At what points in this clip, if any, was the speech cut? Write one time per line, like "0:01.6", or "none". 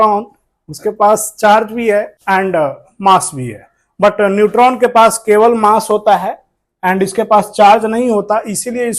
0:02.1